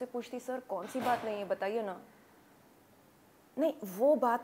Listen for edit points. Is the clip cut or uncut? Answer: uncut